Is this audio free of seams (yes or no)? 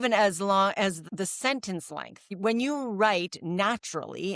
no